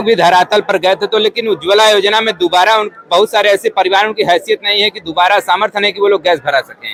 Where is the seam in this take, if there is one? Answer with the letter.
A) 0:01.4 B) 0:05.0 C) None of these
C